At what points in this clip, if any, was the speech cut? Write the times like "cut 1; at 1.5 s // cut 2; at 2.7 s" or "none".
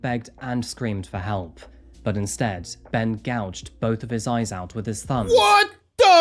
none